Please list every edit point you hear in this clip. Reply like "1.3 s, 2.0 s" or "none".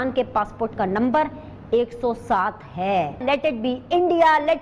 3.2 s